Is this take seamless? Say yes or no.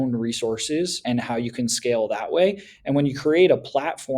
no